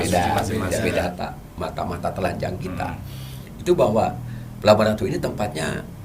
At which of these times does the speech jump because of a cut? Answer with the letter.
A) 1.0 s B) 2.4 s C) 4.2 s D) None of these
A